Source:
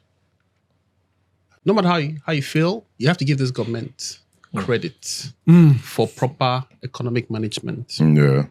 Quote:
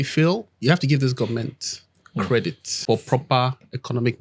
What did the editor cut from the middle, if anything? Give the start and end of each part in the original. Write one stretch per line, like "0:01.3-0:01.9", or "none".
0:05.1-0:05.9